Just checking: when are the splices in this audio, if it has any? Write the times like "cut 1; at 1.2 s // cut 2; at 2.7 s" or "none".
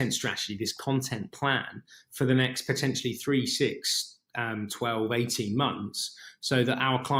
none